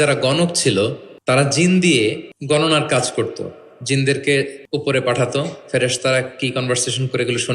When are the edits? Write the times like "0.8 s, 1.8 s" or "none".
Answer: 1.1 s, 2.3 s, 4.6 s